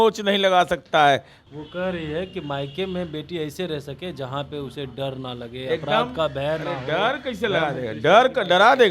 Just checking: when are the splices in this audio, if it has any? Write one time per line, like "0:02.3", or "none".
0:01.4